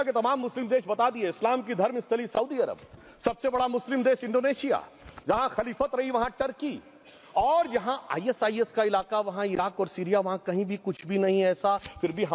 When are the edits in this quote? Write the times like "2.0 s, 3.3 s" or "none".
none